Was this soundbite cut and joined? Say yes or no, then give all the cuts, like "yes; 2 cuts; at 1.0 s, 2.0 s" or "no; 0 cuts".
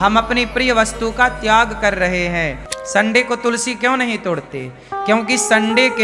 yes; 1 cut; at 2.7 s